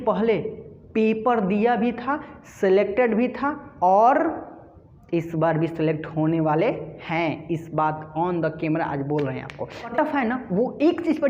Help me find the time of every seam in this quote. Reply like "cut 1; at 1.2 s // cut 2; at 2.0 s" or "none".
cut 1; at 9.9 s